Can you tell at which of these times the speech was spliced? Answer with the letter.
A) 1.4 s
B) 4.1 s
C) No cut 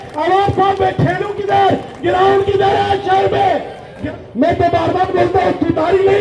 B